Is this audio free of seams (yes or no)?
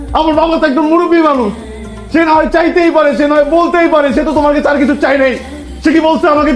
yes